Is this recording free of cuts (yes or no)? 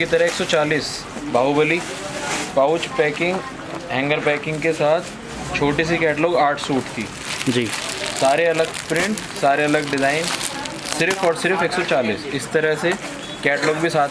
yes